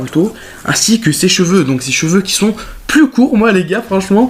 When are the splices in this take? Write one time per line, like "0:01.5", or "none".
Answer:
none

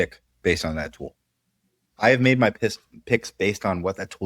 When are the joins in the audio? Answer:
none

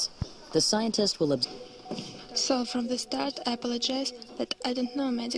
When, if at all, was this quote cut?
none

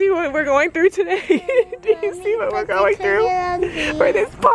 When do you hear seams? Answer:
none

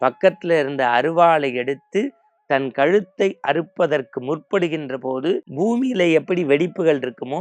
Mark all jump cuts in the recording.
0:05.5

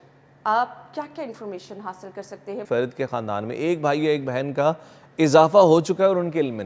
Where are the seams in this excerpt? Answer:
0:02.6

